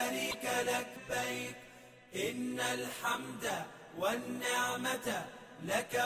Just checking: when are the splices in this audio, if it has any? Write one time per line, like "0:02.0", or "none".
0:01.0